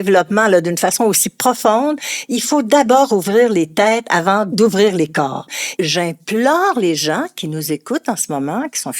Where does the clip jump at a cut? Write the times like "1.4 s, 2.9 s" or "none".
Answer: 4.5 s, 5.5 s